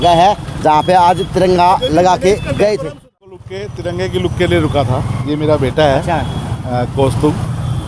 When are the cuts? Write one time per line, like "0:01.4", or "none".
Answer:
0:03.4